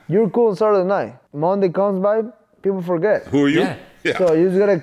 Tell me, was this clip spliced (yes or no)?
yes